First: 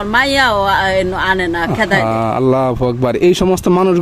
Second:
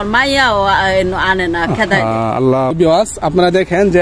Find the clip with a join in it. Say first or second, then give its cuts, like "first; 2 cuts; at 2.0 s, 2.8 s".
second; 1 cut; at 2.7 s